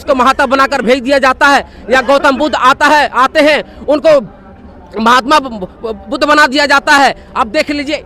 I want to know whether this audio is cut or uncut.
uncut